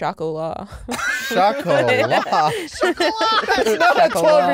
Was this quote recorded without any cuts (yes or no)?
yes